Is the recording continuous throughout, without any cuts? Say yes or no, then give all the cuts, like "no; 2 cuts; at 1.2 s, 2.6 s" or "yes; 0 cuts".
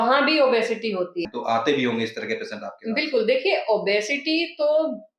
no; 1 cut; at 1.2 s